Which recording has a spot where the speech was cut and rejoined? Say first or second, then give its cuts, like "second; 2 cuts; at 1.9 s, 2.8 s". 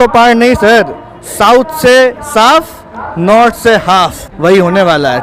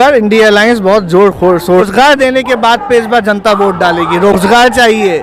second; 1 cut; at 1.9 s